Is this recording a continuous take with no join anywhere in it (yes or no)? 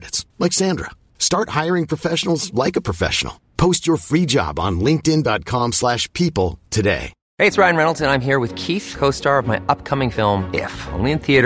no